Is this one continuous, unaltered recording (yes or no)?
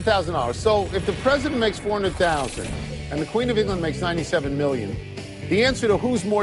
yes